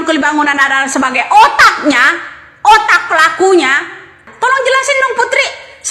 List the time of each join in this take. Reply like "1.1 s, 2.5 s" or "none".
4.3 s